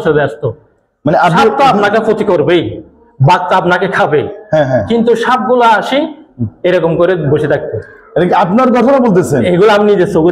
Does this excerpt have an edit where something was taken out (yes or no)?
no